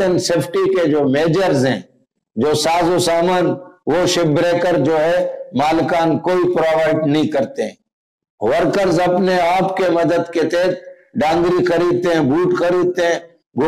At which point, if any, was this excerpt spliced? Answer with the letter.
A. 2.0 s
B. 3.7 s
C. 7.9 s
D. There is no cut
D